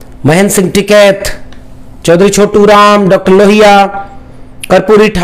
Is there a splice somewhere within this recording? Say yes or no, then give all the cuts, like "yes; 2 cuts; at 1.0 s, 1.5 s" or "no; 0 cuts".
no; 0 cuts